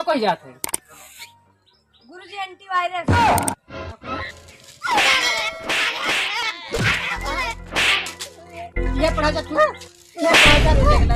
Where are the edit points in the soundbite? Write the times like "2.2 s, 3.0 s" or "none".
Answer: none